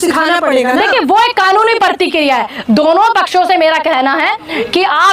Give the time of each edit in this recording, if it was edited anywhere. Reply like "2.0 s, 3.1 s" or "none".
none